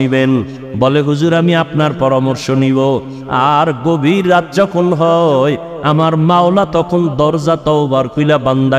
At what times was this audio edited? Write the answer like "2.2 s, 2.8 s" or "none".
none